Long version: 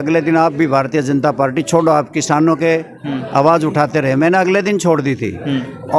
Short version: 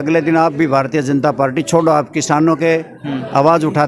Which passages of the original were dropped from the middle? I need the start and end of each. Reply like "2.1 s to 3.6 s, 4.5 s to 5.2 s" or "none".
none